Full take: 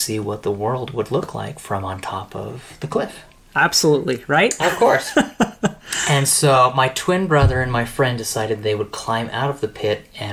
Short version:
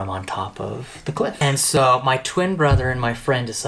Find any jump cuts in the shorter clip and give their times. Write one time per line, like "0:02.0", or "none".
0:01.8